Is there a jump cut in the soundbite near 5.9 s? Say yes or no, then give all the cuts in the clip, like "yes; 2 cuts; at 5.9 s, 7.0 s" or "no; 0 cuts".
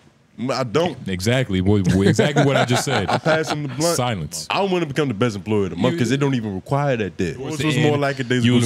no; 2 cuts; at 4.4 s, 7.6 s